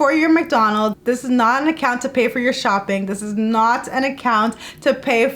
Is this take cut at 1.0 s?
yes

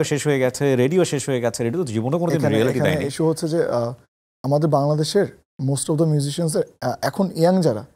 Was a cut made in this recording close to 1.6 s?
no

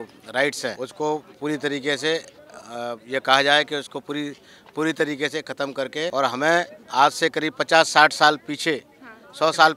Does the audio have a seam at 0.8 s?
yes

